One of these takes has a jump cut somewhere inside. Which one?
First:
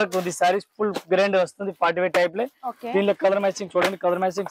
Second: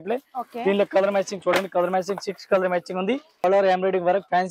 second; 1 cut; at 3.4 s

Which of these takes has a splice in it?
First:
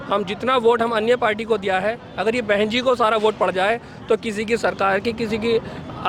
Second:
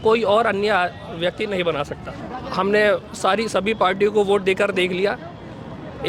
second; 1 cut; at 2.3 s

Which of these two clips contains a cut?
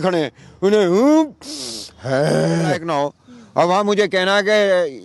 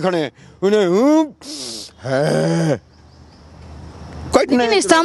first; 1 cut; at 2.8 s

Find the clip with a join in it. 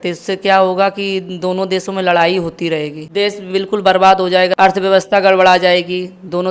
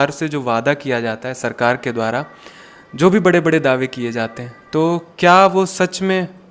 first; 2 cuts; at 3.0 s, 4.5 s

